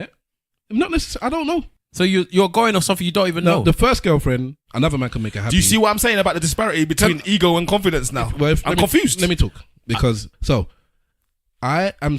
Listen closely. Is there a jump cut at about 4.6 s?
no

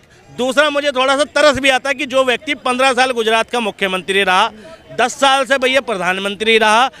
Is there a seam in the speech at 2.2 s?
no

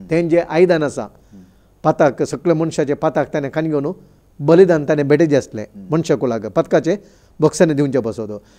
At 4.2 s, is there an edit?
no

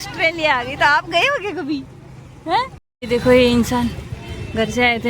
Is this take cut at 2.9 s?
yes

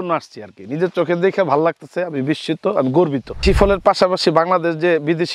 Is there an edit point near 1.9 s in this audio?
no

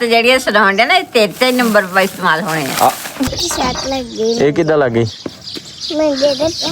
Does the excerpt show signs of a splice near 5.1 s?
no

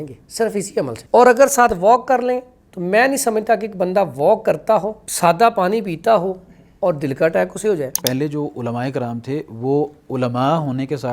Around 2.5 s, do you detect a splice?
no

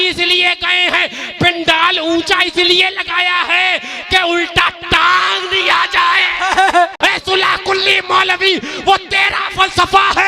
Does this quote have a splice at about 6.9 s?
yes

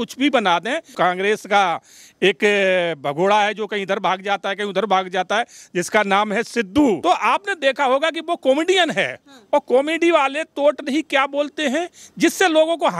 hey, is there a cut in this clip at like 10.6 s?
no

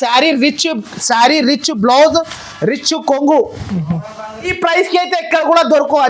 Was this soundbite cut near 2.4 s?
no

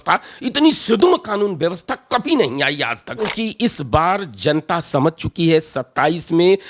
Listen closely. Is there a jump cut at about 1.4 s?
no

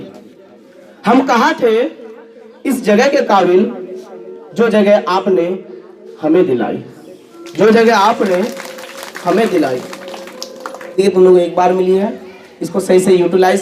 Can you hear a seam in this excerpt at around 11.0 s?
yes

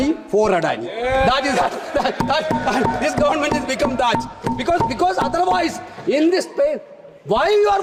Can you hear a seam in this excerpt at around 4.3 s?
no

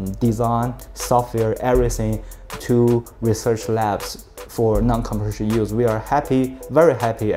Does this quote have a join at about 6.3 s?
no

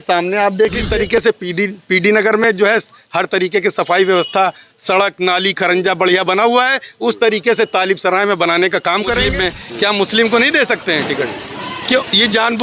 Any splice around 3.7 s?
no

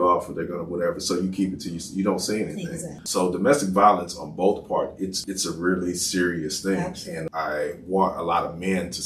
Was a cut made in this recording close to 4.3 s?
no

